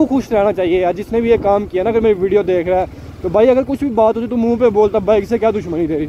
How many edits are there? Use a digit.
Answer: 0